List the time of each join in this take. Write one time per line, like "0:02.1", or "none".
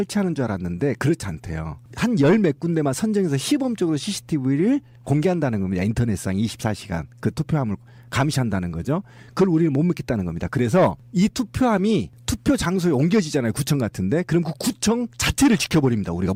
none